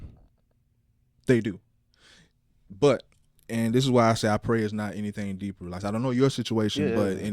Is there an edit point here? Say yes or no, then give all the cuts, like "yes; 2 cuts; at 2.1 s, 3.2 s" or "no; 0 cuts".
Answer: no; 0 cuts